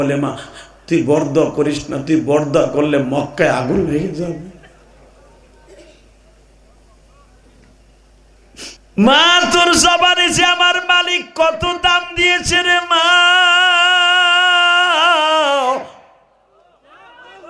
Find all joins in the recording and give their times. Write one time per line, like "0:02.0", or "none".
0:08.8